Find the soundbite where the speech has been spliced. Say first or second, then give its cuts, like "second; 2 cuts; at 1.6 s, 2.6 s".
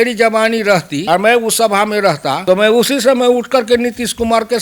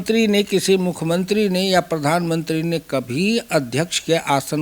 first; 2 cuts; at 0.9 s, 2.3 s